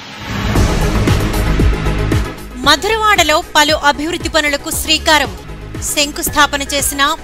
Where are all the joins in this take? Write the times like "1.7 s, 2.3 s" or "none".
1.0 s